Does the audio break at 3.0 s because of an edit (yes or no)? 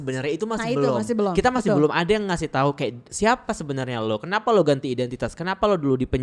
yes